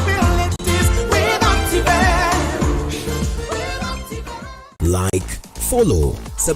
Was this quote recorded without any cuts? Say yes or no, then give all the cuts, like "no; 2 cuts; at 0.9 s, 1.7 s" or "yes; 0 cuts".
no; 1 cut; at 4.7 s